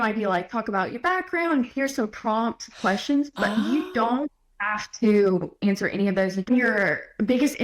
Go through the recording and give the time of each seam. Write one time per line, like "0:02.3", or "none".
0:06.5